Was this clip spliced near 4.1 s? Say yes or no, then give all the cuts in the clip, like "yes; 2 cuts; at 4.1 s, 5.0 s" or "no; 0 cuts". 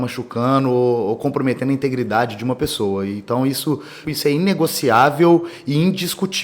yes; 1 cut; at 4.1 s